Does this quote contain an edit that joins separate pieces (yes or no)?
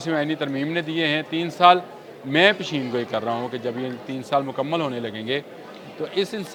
no